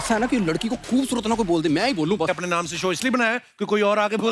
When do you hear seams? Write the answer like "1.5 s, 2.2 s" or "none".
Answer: 2.3 s